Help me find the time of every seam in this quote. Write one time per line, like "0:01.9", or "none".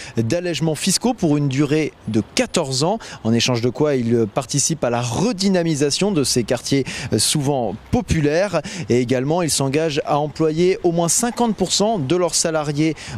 none